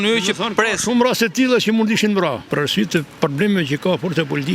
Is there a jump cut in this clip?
yes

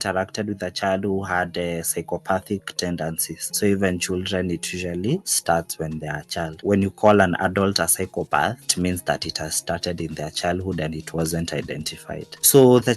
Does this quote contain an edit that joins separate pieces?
no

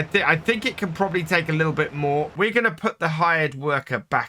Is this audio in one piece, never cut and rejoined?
no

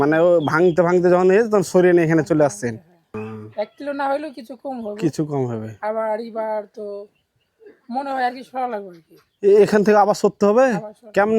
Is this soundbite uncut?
no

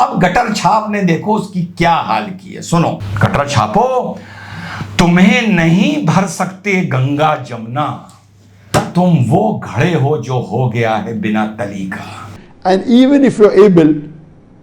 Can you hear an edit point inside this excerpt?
yes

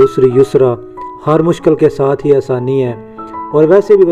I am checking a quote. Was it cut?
no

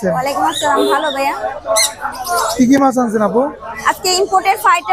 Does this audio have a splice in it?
no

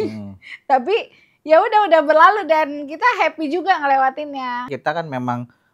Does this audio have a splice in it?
yes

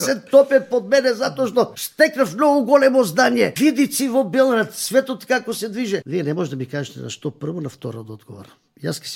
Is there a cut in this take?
yes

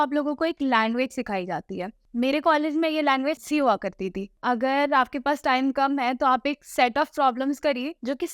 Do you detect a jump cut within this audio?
yes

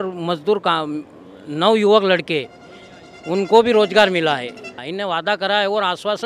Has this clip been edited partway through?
yes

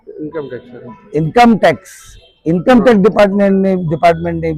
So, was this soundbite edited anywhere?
no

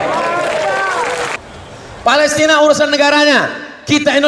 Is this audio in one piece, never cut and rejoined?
no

